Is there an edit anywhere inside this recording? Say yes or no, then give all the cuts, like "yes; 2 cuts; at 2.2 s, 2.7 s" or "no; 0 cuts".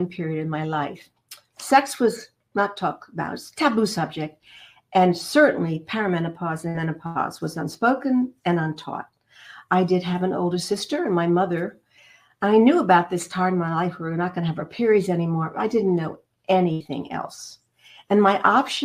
no; 0 cuts